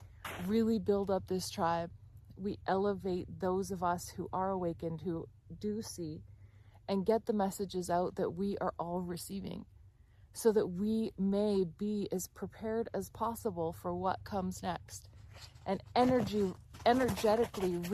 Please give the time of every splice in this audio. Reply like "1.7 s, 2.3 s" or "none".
none